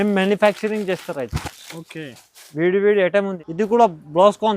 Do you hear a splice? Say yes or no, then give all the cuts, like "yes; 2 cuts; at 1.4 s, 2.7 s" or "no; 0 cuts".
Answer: yes; 1 cut; at 3.4 s